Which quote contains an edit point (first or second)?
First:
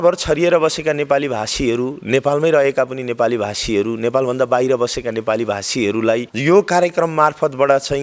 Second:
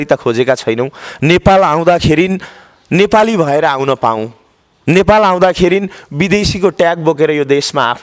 first